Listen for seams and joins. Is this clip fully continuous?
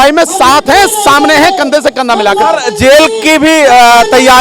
yes; 0 cuts

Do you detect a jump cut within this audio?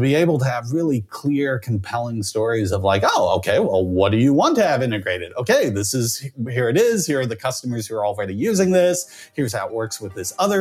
no; 0 cuts

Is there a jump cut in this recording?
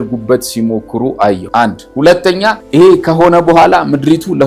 yes; 2 cuts; at 1.4 s, 2.6 s

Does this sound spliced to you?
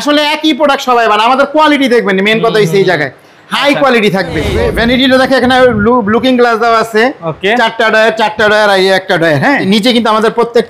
yes; 2 cuts; at 4.5 s, 9.6 s

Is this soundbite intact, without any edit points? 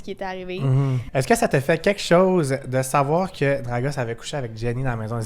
no; 1 cut; at 1.0 s

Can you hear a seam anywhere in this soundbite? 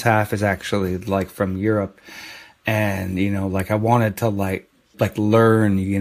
yes; 1 cut; at 4.9 s

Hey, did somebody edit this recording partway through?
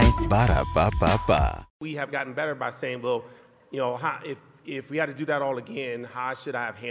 yes; 1 cut; at 1.7 s

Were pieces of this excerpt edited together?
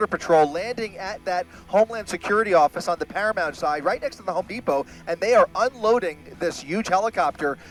no; 0 cuts

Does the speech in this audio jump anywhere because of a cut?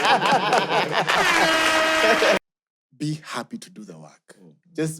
yes; 1 cut; at 2.4 s

